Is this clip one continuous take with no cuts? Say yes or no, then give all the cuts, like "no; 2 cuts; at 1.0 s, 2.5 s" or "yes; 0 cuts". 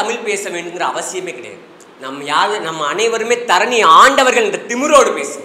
yes; 0 cuts